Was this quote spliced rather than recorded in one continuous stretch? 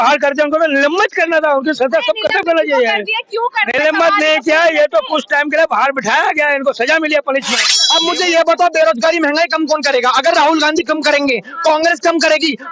yes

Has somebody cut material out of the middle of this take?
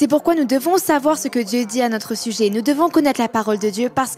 no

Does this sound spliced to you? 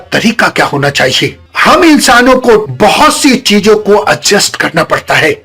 yes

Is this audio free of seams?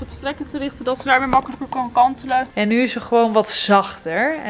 no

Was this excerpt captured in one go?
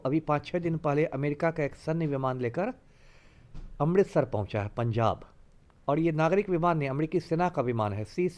yes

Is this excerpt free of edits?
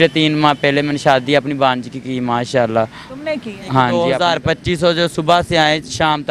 no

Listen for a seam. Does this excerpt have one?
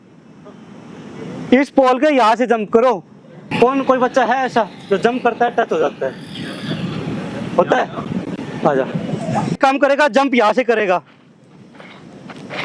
yes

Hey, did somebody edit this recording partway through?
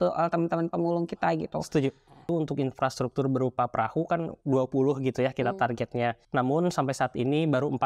yes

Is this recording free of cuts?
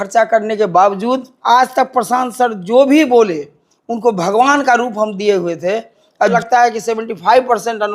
no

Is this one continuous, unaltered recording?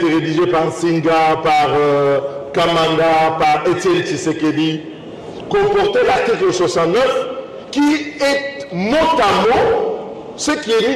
yes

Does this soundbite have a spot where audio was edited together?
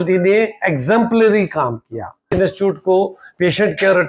yes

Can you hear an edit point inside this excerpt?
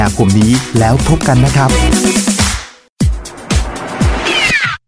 yes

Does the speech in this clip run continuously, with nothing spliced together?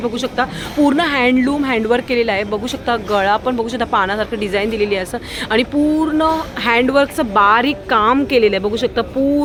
yes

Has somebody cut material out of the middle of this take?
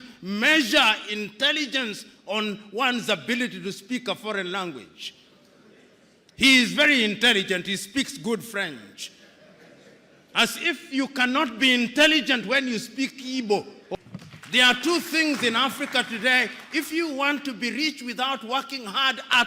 yes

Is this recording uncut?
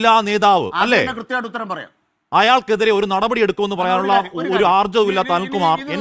yes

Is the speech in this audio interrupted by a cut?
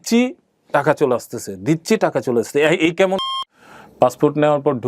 yes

